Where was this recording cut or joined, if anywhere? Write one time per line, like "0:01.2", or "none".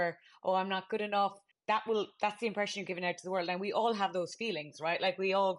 0:01.5